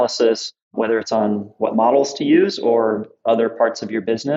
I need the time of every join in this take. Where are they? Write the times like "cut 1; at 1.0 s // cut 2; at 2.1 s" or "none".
cut 1; at 1.6 s // cut 2; at 3.1 s